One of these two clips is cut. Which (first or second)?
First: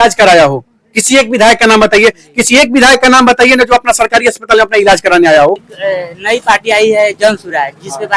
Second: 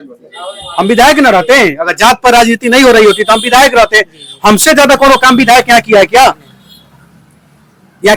first